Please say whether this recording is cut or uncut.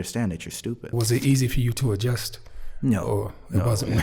cut